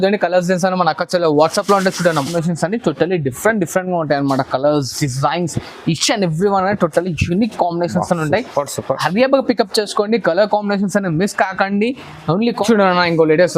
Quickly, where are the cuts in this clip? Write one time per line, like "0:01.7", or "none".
0:02.3
0:12.6